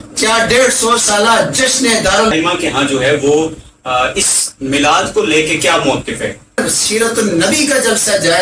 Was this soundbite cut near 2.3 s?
yes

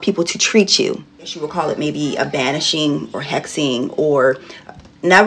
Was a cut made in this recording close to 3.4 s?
no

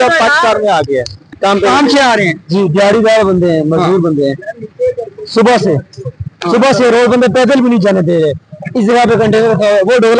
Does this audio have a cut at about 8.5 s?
no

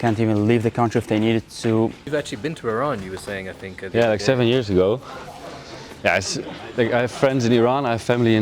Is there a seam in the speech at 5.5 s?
no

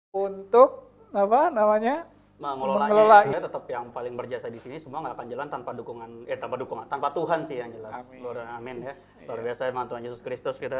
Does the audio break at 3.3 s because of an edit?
yes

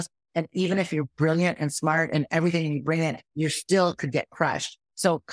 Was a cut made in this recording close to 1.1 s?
no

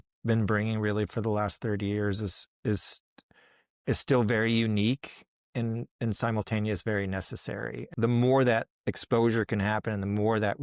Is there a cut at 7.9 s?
yes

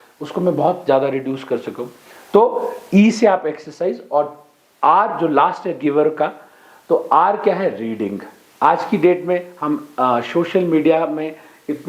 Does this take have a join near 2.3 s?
no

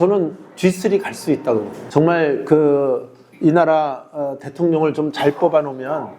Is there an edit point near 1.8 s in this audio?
yes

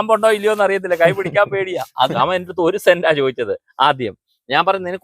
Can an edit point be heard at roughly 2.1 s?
yes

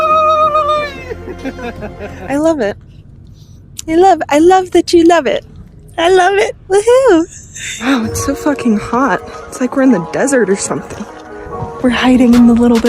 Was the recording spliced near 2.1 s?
yes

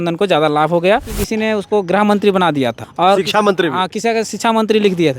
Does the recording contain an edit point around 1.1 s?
yes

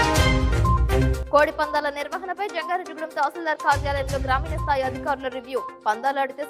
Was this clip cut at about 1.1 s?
no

